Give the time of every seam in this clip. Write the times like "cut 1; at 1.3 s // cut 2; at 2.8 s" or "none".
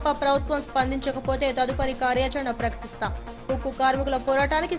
none